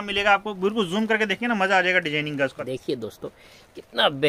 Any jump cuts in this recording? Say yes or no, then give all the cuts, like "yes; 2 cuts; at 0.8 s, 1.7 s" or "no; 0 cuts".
yes; 1 cut; at 2.6 s